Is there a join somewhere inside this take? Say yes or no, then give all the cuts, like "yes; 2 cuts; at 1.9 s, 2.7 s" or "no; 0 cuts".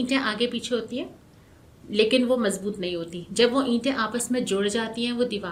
no; 0 cuts